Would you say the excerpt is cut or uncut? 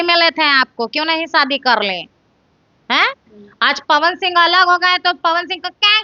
uncut